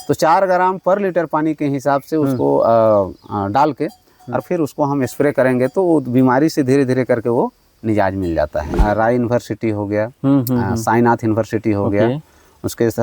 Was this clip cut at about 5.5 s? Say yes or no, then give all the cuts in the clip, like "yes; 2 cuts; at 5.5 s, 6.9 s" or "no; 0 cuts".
no; 1 cut; at 8.8 s